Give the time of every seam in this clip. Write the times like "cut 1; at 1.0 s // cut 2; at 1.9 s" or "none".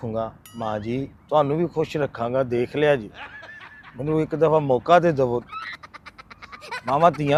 none

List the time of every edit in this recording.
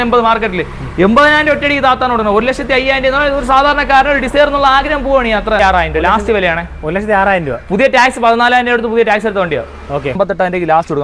cut 1; at 5.6 s // cut 2; at 10.2 s

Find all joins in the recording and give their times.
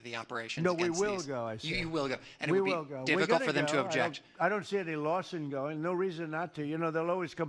cut 1; at 3.4 s

